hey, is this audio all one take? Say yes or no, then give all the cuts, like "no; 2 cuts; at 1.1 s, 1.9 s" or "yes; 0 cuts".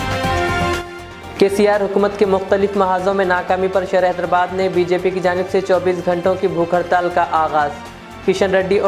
no; 1 cut; at 1.0 s